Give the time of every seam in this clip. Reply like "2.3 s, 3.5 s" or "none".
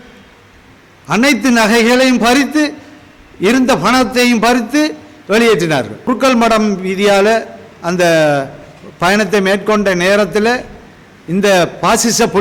6.1 s